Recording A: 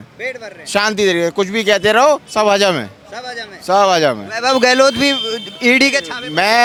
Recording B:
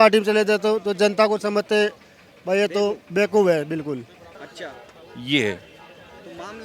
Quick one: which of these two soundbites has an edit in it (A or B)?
B